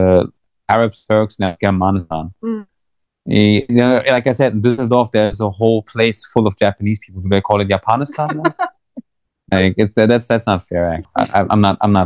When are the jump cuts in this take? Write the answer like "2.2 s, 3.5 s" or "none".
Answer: 11.1 s